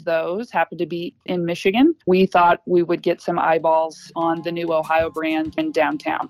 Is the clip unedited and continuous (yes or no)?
no